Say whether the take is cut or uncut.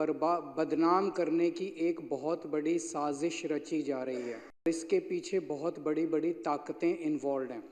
cut